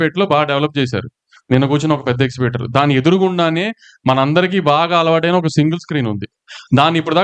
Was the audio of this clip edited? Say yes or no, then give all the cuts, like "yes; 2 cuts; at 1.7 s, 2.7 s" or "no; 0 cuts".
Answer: no; 0 cuts